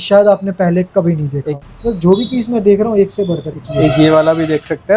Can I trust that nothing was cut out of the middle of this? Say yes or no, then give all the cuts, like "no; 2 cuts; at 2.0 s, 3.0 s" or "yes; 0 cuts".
no; 2 cuts; at 1.5 s, 3.5 s